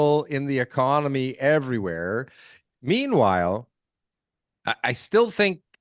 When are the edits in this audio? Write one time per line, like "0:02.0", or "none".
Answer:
none